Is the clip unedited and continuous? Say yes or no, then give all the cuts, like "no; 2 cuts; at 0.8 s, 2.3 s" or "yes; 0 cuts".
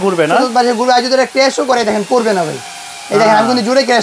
yes; 0 cuts